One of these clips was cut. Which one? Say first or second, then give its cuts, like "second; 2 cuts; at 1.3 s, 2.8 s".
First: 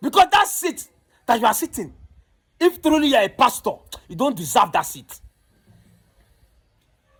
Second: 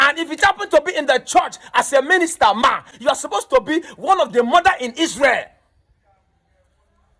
second; 1 cut; at 2.9 s